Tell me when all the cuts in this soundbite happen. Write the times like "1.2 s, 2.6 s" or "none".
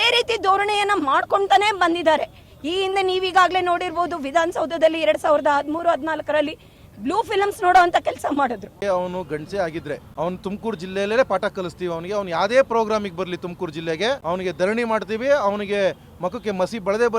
8.8 s, 10.1 s, 14.2 s